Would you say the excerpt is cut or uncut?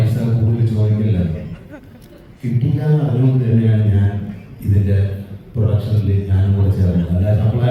uncut